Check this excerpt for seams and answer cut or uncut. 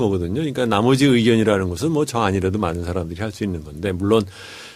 uncut